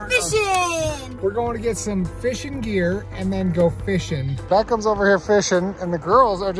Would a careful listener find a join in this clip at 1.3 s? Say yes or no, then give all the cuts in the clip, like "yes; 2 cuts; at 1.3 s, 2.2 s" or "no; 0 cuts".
no; 1 cut; at 4.4 s